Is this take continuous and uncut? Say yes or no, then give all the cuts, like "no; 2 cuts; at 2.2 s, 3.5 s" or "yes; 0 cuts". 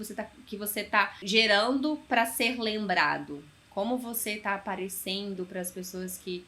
no; 1 cut; at 1.2 s